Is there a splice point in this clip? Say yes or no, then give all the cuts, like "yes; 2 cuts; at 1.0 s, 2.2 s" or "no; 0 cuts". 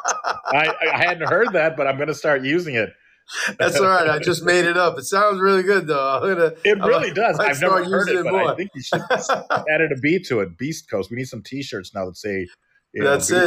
no; 0 cuts